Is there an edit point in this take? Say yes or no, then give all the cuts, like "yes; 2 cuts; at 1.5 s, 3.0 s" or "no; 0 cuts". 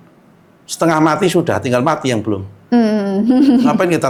no; 0 cuts